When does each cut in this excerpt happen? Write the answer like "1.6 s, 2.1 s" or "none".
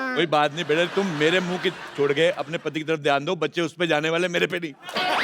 0.9 s